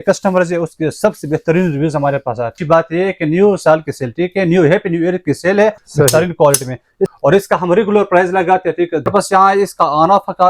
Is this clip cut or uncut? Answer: cut